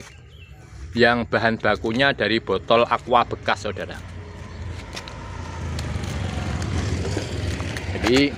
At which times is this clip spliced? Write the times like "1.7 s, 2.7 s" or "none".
none